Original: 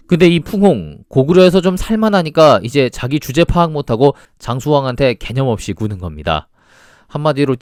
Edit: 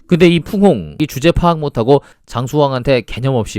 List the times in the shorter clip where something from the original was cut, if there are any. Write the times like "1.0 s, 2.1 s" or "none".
1.0 s